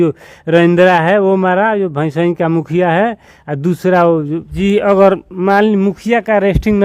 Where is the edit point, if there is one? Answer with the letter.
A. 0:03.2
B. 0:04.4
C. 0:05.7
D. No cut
B